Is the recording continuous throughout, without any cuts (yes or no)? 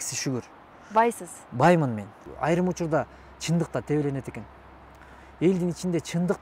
no